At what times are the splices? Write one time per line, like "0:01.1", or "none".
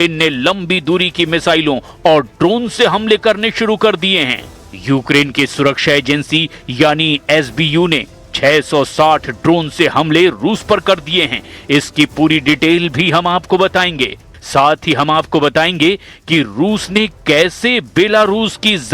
0:14.8